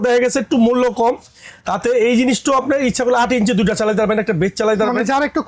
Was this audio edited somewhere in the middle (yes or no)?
no